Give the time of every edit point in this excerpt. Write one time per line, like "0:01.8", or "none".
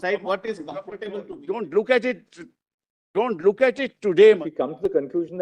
0:01.3
0:04.3